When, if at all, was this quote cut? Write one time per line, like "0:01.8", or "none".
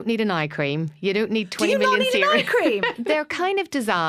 0:03.0